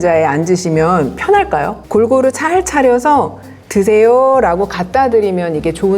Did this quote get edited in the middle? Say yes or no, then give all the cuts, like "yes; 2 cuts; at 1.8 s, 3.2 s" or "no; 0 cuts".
yes; 1 cut; at 1.8 s